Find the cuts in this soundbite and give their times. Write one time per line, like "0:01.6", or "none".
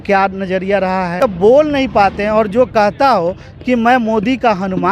0:01.2